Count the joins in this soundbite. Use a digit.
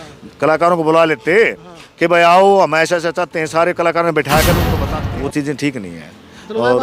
1